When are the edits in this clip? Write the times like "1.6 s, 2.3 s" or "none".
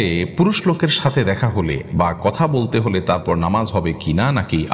none